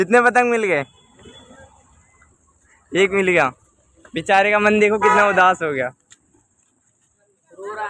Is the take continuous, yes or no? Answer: yes